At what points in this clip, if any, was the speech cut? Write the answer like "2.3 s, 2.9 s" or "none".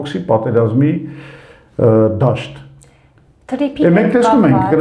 none